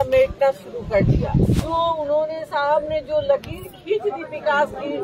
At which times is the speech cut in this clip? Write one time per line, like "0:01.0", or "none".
0:01.6